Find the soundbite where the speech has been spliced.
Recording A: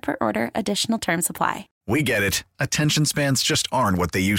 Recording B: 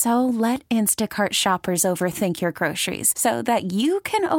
A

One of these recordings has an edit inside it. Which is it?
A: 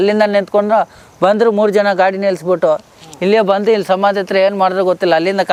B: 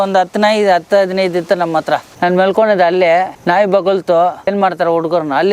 B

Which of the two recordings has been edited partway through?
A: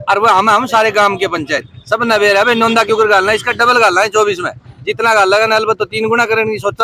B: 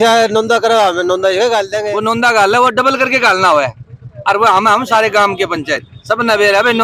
B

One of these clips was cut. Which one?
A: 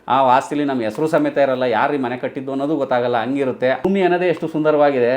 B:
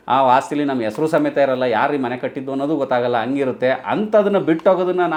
A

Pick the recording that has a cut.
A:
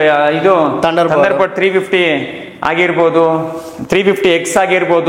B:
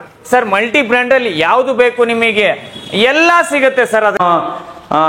B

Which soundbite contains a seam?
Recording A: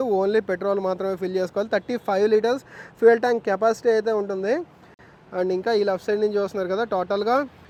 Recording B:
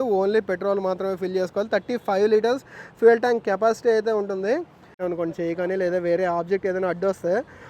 B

